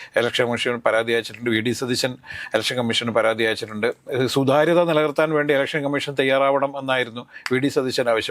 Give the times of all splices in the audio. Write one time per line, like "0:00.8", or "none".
none